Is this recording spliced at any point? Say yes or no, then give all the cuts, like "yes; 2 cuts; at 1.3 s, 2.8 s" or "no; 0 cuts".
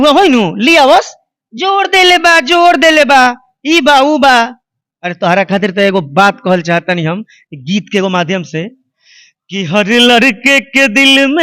no; 0 cuts